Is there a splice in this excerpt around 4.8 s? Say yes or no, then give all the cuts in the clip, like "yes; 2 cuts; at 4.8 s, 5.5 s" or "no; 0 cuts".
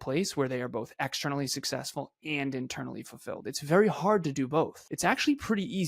yes; 1 cut; at 4.8 s